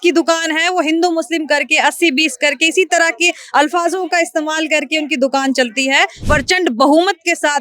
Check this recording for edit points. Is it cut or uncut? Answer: cut